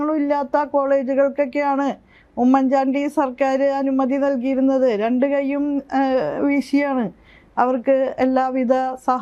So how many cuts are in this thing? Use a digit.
0